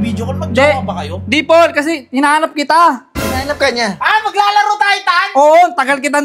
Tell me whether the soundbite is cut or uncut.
uncut